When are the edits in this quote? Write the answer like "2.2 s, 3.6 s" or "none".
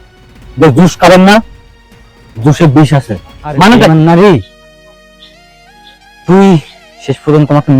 3.9 s

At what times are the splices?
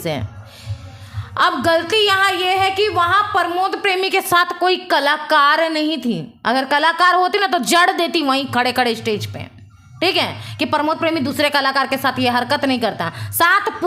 none

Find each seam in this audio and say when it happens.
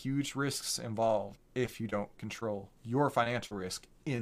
1.4 s, 2.7 s

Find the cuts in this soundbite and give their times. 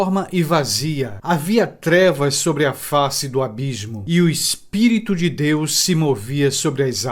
1.1 s, 3.9 s

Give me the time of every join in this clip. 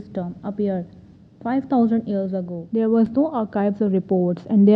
3.1 s

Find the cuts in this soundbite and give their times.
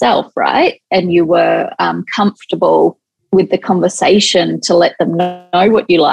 3.1 s

